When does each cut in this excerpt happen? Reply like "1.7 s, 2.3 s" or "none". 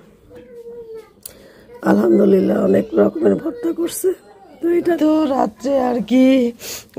5.0 s